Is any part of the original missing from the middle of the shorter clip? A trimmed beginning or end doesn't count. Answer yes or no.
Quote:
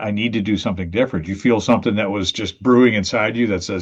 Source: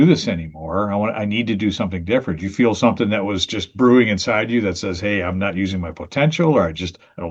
no